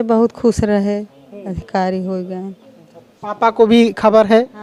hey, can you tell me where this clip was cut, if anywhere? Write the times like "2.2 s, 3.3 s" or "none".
none